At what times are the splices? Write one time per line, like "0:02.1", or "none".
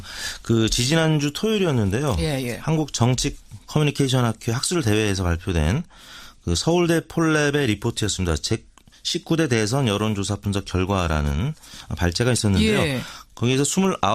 none